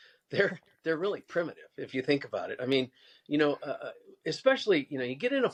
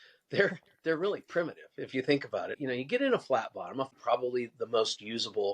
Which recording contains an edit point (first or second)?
second